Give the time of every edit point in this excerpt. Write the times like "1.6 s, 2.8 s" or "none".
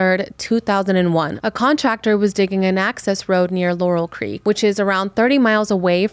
1.3 s, 4.3 s